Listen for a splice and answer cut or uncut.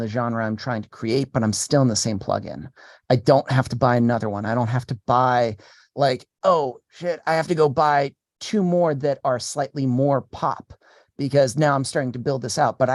uncut